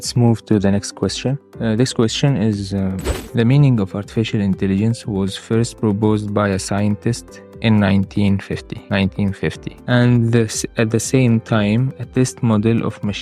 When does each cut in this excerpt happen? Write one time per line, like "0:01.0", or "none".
0:01.5
0:03.1
0:08.7
0:09.7